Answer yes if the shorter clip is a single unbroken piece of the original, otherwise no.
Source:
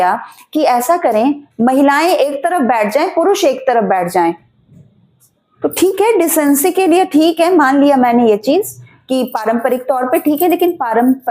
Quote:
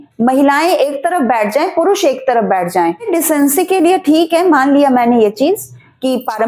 no